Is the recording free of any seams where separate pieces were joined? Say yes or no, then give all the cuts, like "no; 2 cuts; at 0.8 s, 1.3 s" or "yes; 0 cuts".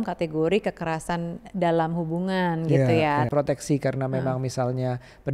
no; 1 cut; at 3.3 s